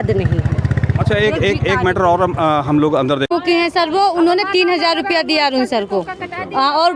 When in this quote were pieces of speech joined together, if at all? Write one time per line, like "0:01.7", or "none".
0:03.3